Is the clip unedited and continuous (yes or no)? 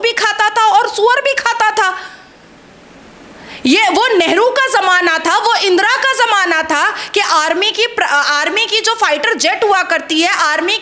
yes